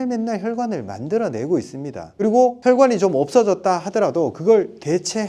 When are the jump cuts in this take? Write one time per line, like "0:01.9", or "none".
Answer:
0:02.4